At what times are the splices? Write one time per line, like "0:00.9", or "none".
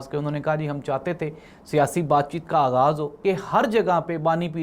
0:03.1